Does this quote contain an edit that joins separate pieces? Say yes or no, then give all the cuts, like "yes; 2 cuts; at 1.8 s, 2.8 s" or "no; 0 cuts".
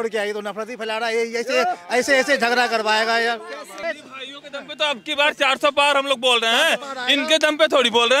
yes; 1 cut; at 3.7 s